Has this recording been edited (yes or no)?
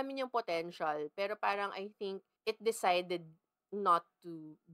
yes